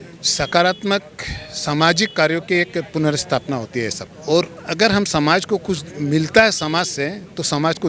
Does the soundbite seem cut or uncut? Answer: uncut